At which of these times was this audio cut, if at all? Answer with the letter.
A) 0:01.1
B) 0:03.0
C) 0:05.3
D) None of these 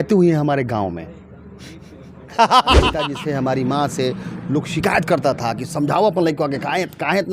B